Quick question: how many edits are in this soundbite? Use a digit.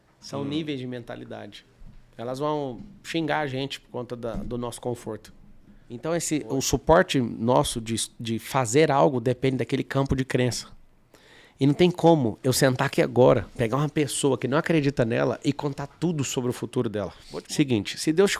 2